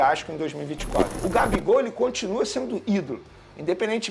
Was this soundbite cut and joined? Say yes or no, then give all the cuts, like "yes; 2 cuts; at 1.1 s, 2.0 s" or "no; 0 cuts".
yes; 1 cut; at 1.1 s